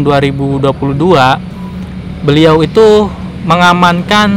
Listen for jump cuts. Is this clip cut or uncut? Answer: uncut